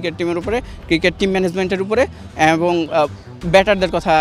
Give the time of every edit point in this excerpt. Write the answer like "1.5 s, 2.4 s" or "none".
none